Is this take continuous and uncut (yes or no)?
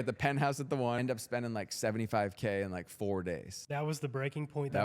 no